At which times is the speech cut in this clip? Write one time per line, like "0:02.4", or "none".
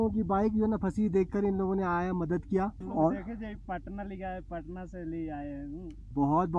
none